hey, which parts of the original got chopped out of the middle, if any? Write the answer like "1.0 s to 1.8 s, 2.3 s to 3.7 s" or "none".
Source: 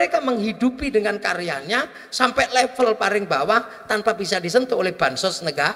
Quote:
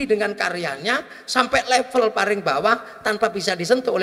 none